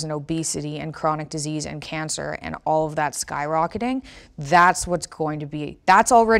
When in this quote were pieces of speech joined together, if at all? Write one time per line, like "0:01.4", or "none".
none